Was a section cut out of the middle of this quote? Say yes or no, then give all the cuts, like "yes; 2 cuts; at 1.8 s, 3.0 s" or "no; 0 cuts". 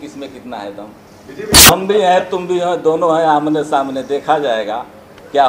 yes; 1 cut; at 1.6 s